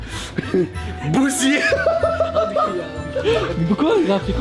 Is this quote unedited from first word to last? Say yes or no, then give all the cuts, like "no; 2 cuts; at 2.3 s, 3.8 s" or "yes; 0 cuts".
yes; 0 cuts